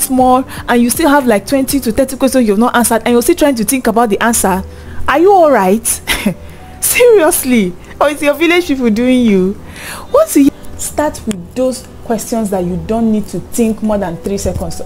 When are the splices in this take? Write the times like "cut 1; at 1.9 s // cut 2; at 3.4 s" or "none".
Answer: cut 1; at 10.5 s